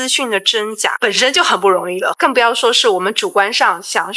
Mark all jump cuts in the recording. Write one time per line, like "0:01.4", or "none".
0:00.9